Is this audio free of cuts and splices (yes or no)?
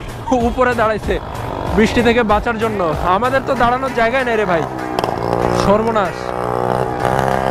yes